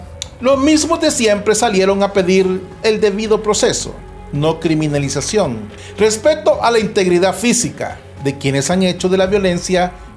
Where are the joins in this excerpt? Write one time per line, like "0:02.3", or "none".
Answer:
none